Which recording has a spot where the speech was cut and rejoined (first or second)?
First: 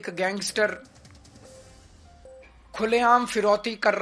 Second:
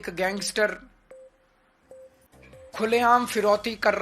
second